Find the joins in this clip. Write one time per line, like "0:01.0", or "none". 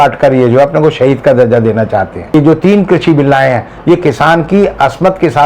0:02.2

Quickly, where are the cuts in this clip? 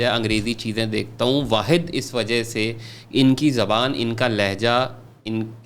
none

